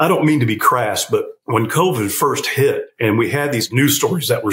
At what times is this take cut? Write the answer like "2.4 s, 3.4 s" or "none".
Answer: 1.4 s, 3.3 s